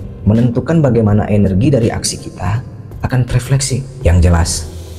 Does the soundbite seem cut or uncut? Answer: cut